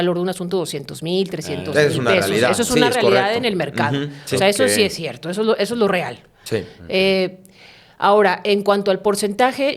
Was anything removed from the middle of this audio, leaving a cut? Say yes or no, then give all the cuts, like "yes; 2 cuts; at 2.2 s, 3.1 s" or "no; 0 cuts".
no; 0 cuts